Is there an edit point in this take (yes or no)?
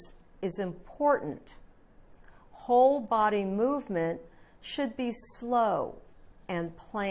yes